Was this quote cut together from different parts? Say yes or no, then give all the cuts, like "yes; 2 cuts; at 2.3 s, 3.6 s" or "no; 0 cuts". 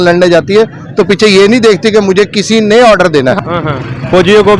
yes; 1 cut; at 3.4 s